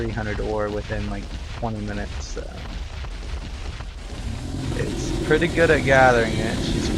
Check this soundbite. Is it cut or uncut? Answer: cut